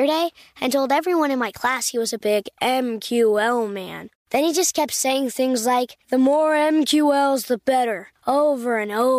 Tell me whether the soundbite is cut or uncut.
uncut